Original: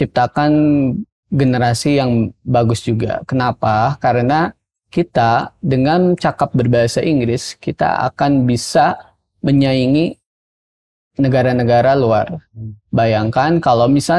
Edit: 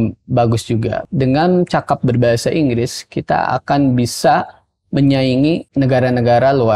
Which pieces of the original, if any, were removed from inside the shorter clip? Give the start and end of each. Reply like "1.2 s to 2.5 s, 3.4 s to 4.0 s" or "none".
3.2 s to 5.6 s, 10.2 s to 11.1 s